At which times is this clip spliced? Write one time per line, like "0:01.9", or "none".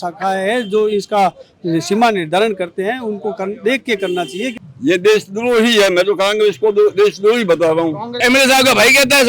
0:04.5
0:08.2